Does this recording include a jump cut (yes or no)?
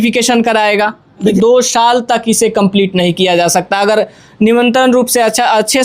yes